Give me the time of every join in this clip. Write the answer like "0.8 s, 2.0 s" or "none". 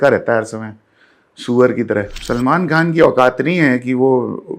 2.2 s